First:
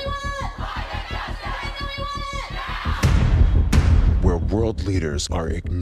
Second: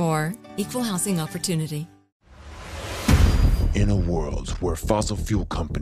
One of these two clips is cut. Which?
second; 1 cut; at 2.1 s

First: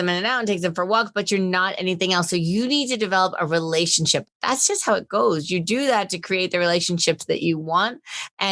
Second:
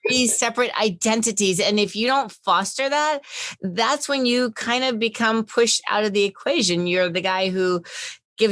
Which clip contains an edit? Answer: first; 1 cut; at 4.2 s

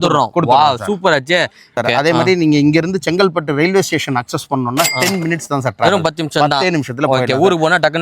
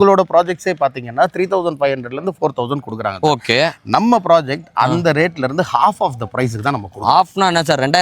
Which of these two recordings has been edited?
first; 1 cut; at 1.8 s

